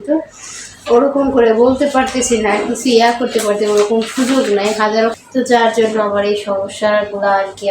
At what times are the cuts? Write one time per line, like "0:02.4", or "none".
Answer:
0:05.2